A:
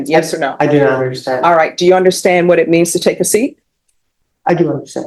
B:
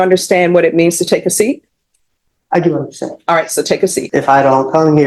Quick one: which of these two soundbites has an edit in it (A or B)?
B